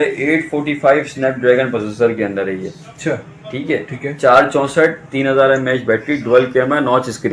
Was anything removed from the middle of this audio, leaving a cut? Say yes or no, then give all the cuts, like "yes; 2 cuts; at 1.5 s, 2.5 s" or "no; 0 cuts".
no; 0 cuts